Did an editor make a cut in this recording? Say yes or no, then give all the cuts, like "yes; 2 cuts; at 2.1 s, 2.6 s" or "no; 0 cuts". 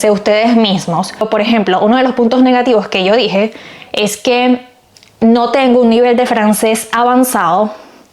yes; 1 cut; at 1.3 s